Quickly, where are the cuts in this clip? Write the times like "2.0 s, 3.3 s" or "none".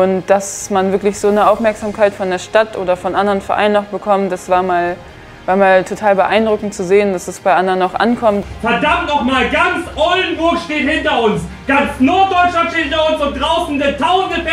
8.4 s